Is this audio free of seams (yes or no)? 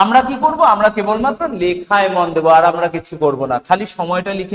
yes